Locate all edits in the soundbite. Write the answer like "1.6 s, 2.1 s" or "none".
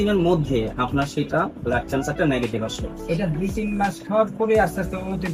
none